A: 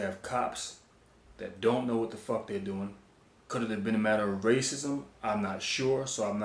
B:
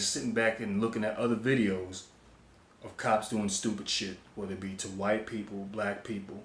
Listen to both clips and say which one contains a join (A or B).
A